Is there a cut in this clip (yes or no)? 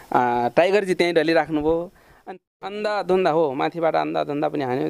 yes